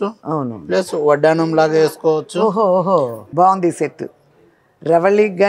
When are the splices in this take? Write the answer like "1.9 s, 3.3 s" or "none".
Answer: 3.2 s